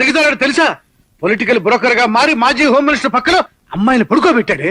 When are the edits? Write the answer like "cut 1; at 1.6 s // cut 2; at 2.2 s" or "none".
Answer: none